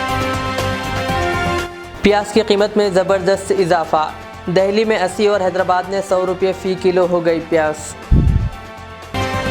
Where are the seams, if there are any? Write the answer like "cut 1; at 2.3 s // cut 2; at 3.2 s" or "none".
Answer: none